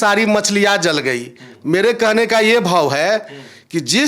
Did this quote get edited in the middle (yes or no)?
no